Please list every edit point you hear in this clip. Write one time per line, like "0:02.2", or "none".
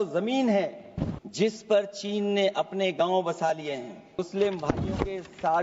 0:01.2
0:04.2